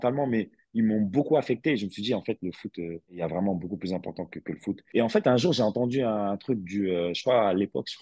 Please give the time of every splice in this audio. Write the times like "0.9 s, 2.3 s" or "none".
4.8 s